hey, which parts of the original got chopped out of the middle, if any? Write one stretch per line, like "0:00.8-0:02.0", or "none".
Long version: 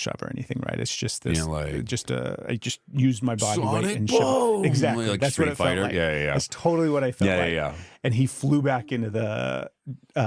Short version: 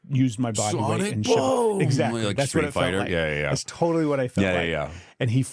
none